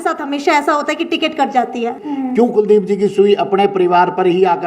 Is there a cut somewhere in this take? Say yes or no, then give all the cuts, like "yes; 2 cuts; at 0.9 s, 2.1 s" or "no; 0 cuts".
yes; 1 cut; at 2.0 s